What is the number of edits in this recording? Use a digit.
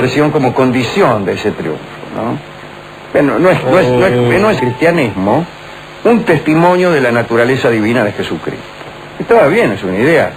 0